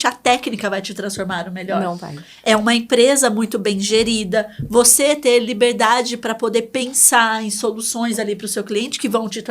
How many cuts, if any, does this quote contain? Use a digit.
0